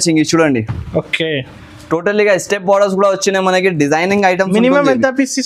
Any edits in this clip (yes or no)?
no